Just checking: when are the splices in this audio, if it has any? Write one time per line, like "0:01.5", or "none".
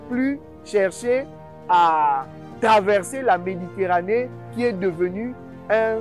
none